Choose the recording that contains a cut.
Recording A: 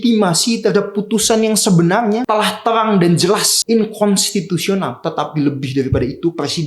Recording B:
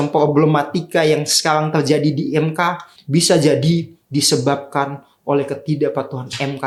A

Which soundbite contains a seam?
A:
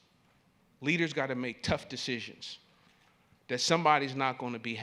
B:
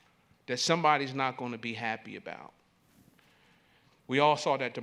B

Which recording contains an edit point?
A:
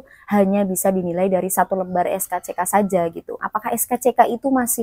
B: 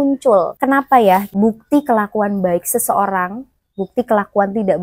A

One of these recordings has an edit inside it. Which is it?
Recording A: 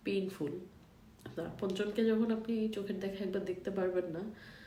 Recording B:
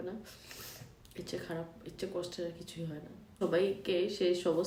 B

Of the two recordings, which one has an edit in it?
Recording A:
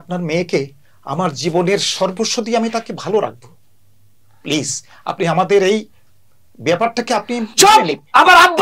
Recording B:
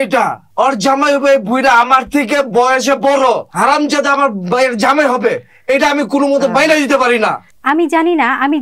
B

